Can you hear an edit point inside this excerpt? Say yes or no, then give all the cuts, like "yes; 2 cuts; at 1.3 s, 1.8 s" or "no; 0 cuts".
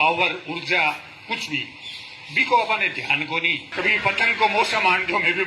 yes; 1 cut; at 3.7 s